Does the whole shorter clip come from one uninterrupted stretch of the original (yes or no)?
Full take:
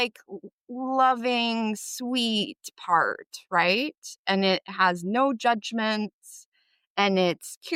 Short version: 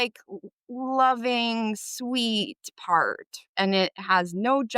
no